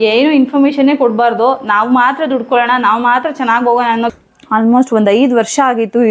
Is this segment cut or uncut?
cut